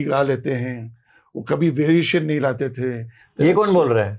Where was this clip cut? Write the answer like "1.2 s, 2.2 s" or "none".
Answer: 3.2 s